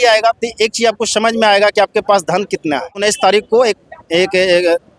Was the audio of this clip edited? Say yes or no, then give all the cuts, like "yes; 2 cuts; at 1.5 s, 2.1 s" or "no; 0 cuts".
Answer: yes; 1 cut; at 3.0 s